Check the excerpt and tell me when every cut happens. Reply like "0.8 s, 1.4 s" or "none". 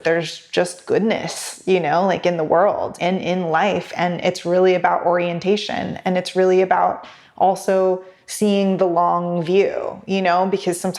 2.9 s

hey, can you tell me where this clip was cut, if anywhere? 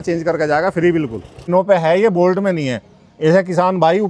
1.4 s

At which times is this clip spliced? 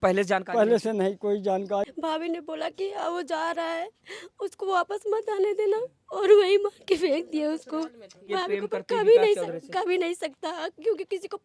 1.8 s, 8.2 s

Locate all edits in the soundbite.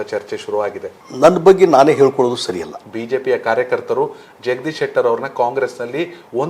1.0 s, 2.8 s

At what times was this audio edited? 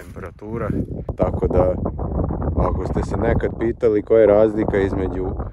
1.1 s

